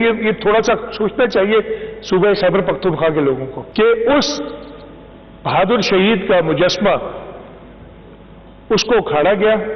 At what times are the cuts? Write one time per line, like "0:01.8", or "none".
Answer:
0:03.6